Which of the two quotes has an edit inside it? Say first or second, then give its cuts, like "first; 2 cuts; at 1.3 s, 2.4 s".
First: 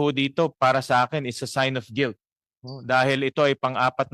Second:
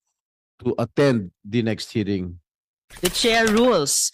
second; 1 cut; at 2.8 s